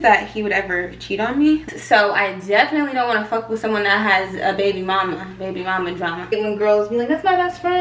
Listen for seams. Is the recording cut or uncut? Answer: cut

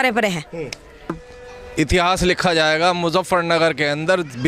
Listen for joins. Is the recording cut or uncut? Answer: cut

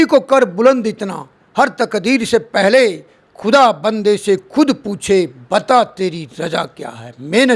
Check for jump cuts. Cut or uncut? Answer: uncut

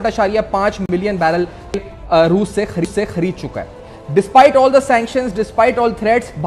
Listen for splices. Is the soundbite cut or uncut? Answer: uncut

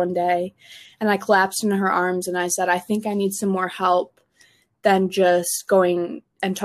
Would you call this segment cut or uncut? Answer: uncut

